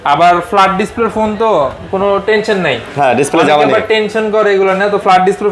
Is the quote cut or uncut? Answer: uncut